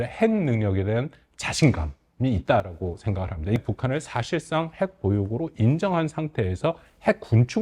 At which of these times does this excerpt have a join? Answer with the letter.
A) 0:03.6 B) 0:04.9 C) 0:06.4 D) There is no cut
A